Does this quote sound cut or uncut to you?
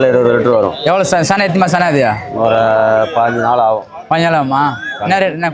uncut